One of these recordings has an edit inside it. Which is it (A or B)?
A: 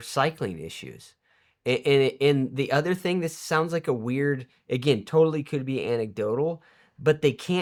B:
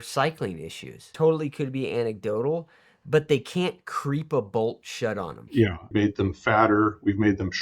B